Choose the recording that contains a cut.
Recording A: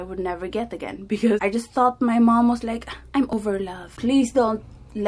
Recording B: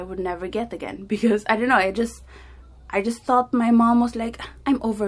A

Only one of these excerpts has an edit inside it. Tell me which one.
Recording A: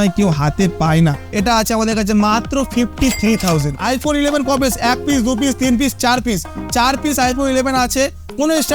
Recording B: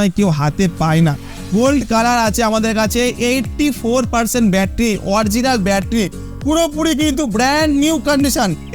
A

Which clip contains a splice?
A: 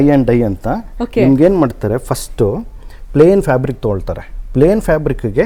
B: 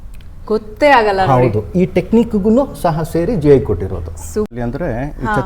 B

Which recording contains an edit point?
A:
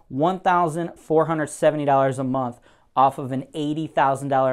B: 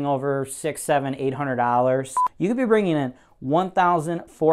B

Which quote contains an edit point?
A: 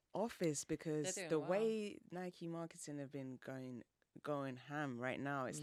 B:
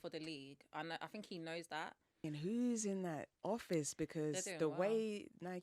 B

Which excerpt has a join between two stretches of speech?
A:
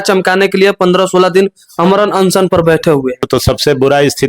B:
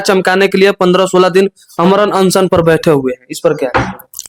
A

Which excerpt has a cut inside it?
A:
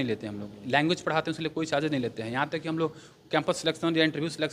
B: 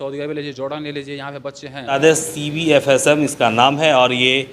B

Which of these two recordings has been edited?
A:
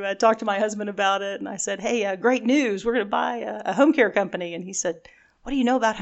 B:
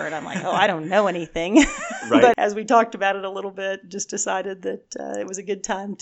B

